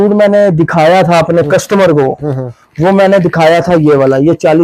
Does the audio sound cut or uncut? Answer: uncut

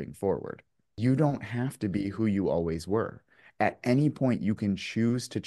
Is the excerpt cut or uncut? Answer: cut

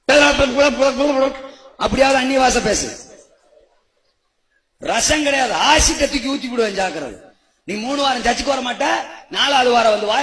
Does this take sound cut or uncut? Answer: uncut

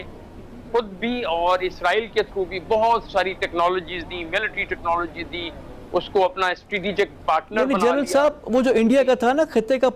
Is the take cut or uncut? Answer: uncut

